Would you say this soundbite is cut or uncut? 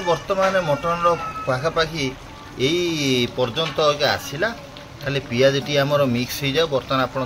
uncut